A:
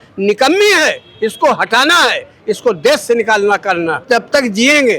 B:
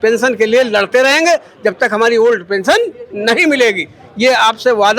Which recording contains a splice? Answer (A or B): A